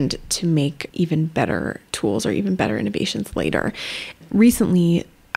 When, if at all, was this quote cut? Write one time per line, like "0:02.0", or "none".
0:01.8